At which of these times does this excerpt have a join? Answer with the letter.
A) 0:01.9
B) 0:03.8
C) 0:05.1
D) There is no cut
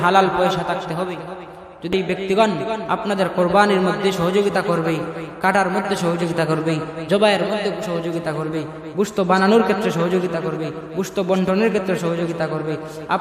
A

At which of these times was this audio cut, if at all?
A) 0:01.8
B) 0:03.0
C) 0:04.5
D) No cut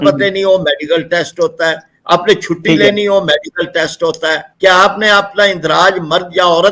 C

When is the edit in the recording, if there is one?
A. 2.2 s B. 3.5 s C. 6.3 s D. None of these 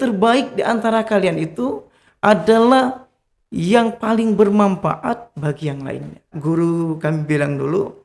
C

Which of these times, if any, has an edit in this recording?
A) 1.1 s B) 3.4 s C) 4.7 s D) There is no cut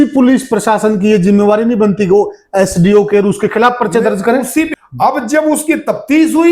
C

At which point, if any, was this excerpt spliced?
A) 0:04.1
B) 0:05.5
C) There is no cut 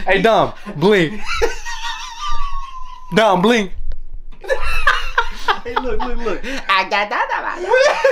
C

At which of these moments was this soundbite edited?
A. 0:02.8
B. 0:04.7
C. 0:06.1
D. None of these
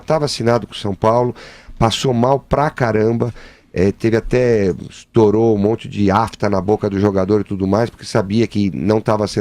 C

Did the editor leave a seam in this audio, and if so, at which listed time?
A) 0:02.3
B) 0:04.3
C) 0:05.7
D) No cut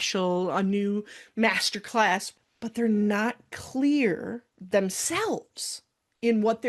A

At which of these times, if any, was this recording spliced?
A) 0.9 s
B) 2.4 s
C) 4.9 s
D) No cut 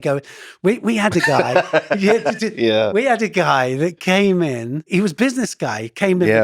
C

